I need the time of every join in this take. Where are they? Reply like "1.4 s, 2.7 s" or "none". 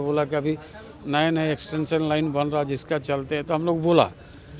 none